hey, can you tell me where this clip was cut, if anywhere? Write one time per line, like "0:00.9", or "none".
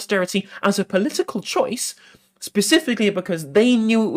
none